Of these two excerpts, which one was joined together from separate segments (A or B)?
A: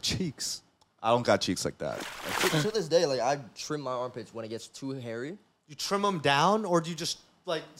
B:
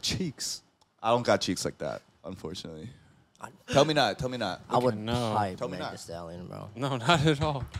A